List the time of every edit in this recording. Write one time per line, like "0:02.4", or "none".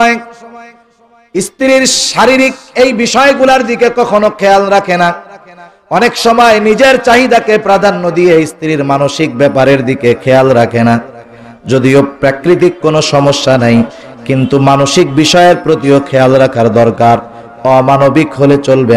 none